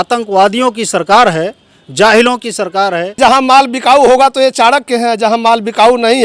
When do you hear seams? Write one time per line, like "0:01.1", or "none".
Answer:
0:03.1

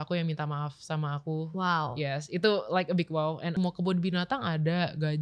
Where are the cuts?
0:03.5

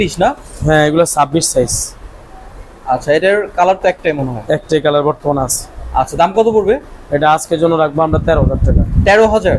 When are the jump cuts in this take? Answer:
none

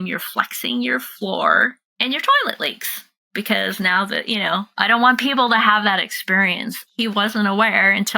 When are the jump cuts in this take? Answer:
0:01.9
0:04.7

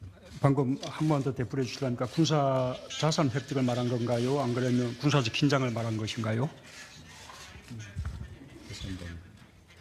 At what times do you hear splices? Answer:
0:01.5

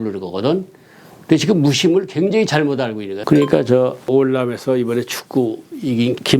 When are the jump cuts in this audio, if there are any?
0:03.1

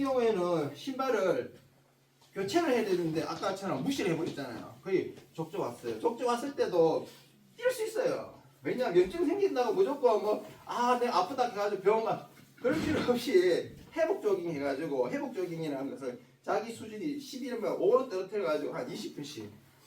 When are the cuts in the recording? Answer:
none

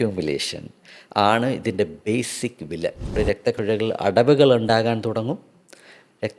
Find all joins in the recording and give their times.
0:03.1

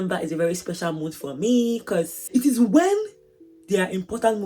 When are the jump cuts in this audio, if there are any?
0:02.2

